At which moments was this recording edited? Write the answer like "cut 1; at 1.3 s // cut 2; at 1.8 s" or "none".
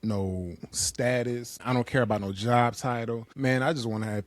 cut 1; at 1.6 s // cut 2; at 3.3 s